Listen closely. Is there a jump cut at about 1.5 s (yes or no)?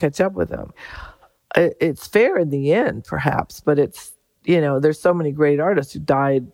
no